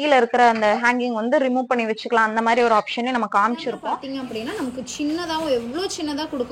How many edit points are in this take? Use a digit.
1